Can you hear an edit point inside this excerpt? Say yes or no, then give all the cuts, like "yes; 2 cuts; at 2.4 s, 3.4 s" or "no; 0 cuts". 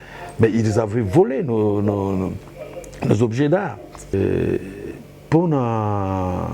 yes; 1 cut; at 4.1 s